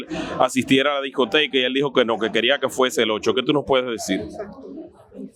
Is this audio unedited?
yes; 0 cuts

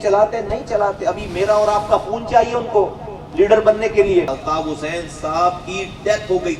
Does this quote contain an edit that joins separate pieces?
yes; 1 cut; at 4.3 s

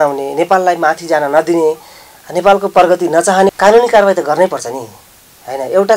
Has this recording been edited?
yes; 1 cut; at 3.5 s

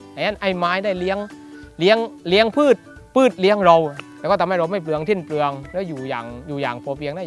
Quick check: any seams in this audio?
no; 0 cuts

